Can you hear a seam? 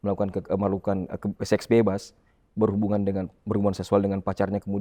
no; 0 cuts

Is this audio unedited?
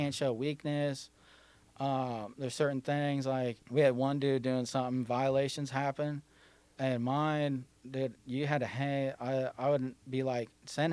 no; 1 cut; at 3.6 s

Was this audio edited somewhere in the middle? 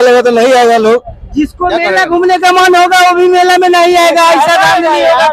no; 0 cuts

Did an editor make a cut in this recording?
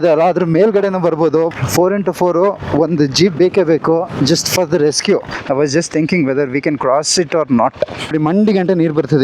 yes; 3 cuts; at 1.5 s, 5.3 s, 8.1 s

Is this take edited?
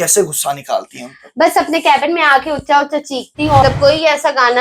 yes; 1 cut; at 3.6 s

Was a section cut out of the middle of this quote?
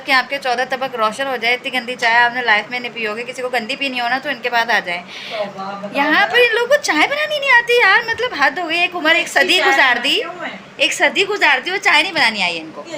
no; 0 cuts

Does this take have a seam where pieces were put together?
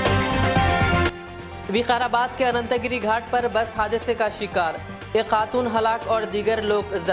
no; 0 cuts

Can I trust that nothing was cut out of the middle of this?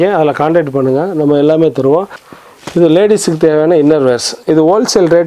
no; 1 cut; at 2.2 s

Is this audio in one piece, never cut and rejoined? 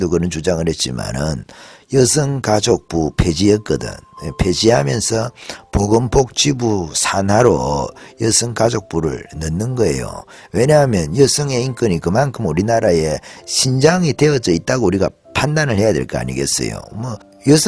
yes; 0 cuts

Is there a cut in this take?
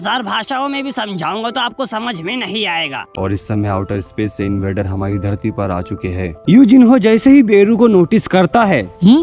yes; 2 cuts; at 3.1 s, 6.4 s

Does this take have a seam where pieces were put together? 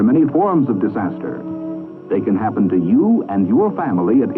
no; 0 cuts

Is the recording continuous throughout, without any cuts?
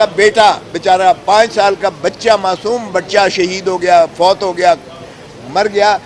yes; 0 cuts

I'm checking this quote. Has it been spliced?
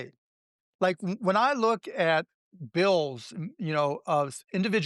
no; 0 cuts

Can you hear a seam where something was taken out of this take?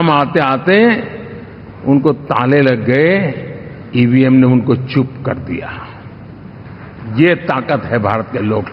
no; 0 cuts

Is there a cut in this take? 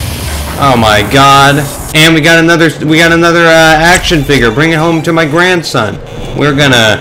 yes; 1 cut; at 1.8 s

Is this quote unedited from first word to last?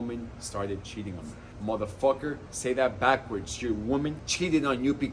no; 2 cuts; at 1.4 s, 4.2 s

